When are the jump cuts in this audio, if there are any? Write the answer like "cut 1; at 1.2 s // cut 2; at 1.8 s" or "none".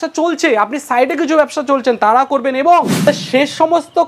cut 1; at 2.9 s